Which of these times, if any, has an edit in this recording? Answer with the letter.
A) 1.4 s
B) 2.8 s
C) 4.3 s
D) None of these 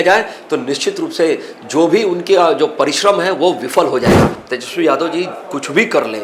C